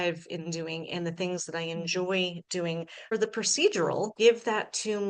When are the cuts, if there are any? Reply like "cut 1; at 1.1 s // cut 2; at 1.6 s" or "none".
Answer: cut 1; at 3.1 s // cut 2; at 4.1 s